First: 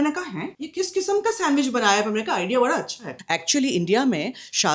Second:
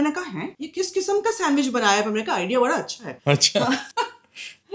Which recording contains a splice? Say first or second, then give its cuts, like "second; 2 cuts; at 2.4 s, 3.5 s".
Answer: first; 1 cut; at 3.1 s